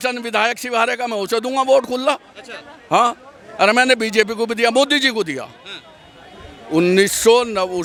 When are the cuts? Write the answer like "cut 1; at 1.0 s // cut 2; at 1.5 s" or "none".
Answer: none